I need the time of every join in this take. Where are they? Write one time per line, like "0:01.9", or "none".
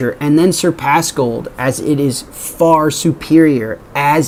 none